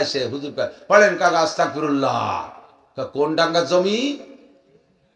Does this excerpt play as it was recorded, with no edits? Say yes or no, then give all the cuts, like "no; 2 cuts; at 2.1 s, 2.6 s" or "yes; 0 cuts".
yes; 0 cuts